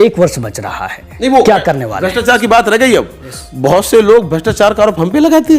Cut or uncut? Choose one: uncut